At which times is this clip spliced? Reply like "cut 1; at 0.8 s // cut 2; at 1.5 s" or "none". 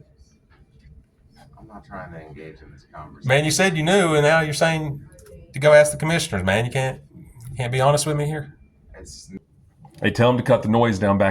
cut 1; at 9.6 s